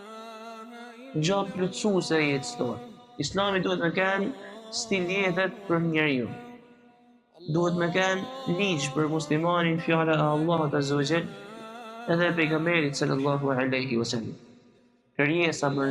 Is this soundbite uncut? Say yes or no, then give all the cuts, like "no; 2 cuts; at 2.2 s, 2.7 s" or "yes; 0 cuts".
no; 1 cut; at 15.0 s